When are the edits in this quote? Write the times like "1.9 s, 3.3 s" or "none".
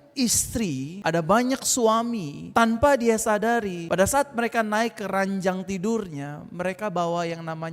0.9 s, 2.3 s, 3.8 s